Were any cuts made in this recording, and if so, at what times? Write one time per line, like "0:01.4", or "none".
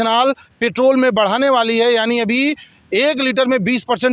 none